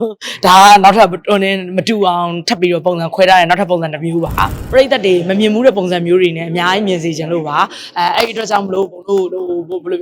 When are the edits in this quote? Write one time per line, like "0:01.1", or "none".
0:04.5